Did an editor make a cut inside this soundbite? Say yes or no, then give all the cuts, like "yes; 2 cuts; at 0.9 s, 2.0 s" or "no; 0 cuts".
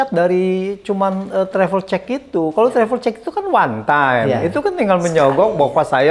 no; 0 cuts